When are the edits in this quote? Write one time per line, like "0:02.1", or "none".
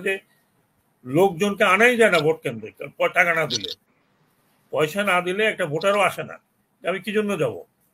none